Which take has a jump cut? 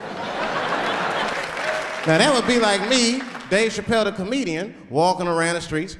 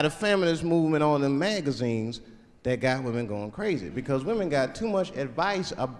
first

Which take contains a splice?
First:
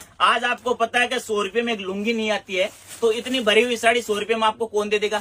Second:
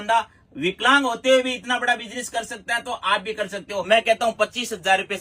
second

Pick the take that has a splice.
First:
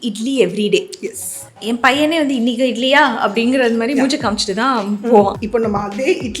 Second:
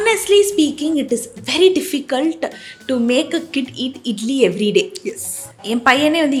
first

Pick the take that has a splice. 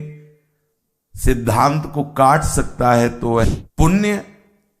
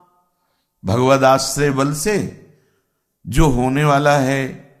first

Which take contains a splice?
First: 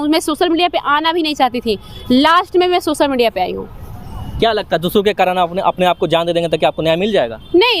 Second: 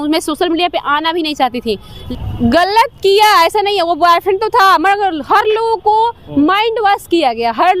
second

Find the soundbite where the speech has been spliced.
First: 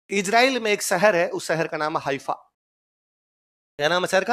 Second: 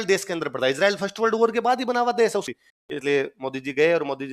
second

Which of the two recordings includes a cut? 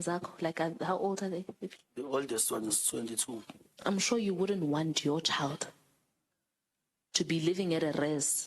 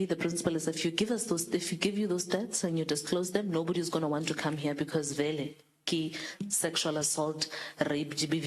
first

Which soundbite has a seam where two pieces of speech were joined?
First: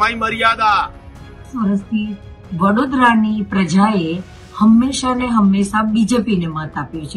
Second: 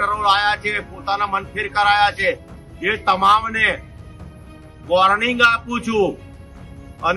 first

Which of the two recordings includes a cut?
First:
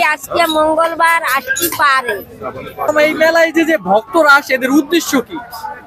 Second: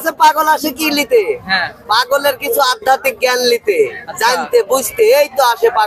first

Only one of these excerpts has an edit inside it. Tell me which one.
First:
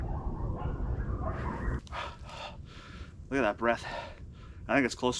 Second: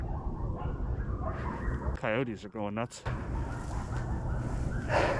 first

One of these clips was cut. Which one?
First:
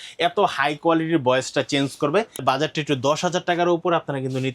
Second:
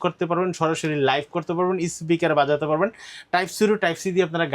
first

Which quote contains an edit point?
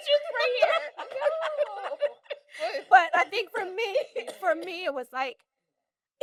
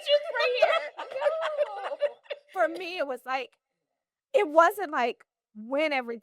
second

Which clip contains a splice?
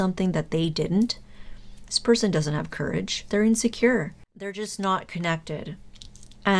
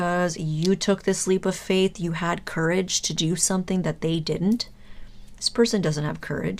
first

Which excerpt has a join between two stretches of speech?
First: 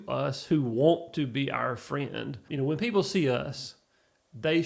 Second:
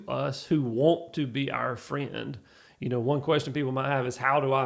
first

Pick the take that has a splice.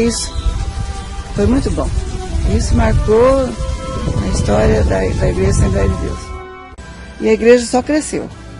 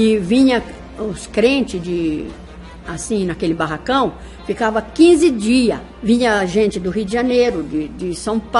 first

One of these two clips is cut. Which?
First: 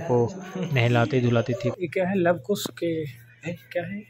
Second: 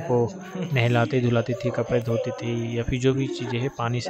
first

